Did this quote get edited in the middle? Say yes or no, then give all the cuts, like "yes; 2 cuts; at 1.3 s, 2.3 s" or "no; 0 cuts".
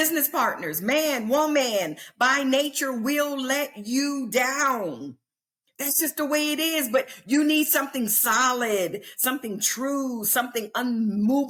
no; 0 cuts